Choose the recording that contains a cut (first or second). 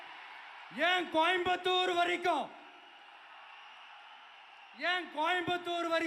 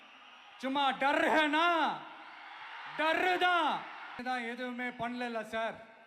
second